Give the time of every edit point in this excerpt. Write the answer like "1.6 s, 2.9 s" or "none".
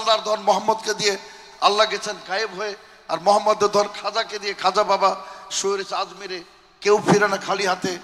none